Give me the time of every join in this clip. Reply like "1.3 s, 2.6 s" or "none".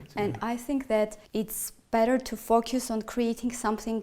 1.2 s